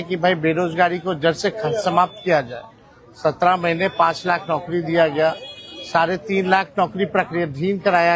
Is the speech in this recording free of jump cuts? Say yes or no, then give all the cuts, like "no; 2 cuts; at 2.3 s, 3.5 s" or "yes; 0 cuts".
yes; 0 cuts